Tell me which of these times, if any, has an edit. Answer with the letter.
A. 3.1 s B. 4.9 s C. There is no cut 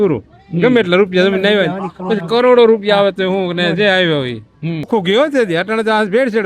B